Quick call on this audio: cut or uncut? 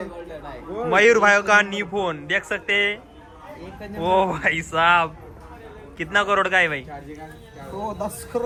uncut